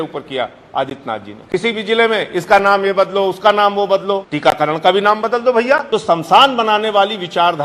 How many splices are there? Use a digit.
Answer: 3